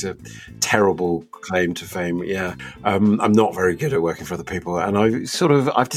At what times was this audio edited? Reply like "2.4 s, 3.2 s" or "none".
2.6 s